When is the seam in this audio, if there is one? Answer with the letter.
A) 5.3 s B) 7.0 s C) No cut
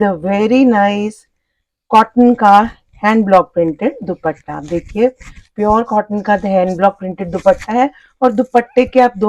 C